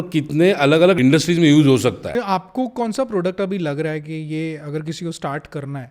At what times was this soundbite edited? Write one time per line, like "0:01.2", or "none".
0:01.0
0:02.1